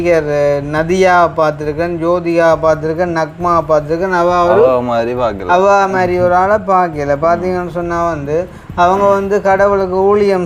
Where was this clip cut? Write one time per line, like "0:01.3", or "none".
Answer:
none